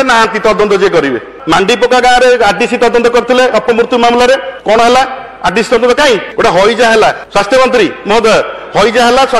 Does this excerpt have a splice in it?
yes; 4 cuts; at 1.3 s, 4.5 s, 6.3 s, 7.2 s

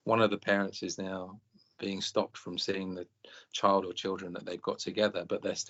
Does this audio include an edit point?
no; 0 cuts

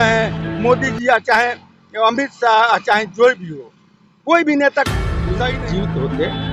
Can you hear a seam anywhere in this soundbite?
yes; 1 cut; at 5.4 s

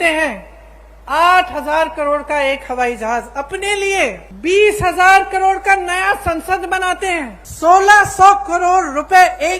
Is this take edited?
yes; 2 cuts; at 4.3 s, 7.4 s

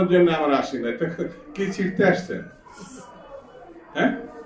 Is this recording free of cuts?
yes; 0 cuts

